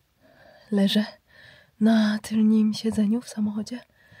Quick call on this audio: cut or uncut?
uncut